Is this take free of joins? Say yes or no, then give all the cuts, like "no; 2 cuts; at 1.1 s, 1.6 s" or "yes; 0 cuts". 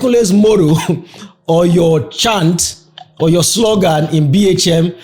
yes; 0 cuts